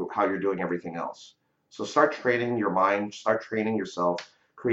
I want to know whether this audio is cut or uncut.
uncut